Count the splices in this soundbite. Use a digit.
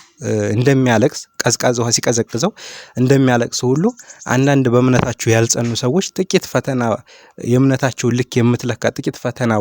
0